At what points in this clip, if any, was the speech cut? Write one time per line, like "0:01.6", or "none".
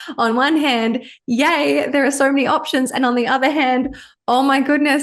none